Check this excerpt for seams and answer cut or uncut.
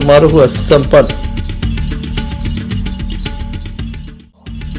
uncut